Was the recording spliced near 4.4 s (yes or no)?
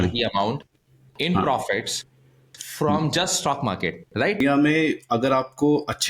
yes